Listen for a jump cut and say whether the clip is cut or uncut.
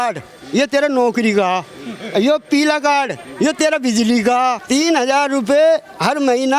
cut